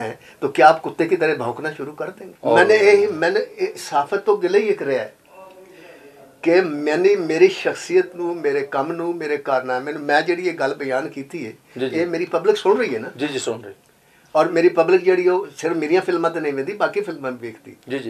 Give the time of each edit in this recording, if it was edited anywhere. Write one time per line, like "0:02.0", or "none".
0:02.2